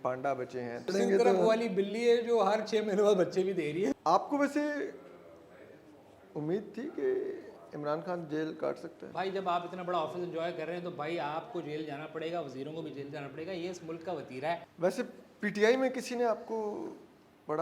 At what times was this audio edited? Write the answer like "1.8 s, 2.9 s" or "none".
0.9 s, 3.9 s, 9.0 s, 14.7 s